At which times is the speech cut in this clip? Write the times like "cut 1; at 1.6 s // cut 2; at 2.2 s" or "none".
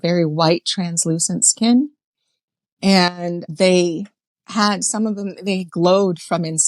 cut 1; at 3.4 s

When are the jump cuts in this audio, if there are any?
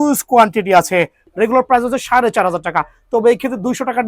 cut 1; at 1.2 s

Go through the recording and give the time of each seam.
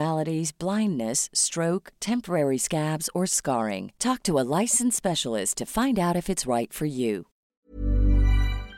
cut 1; at 7.4 s

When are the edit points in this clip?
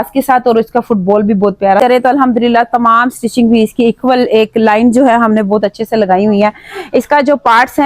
cut 1; at 1.8 s

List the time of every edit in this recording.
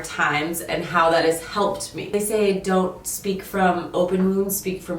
cut 1; at 2.0 s

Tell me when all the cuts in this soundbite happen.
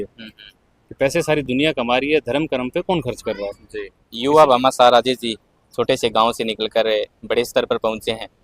cut 1; at 4.2 s

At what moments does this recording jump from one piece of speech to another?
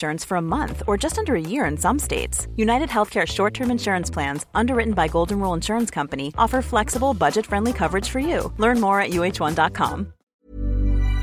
cut 1; at 10.2 s

